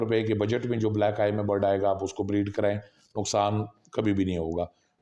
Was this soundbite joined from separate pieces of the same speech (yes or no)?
no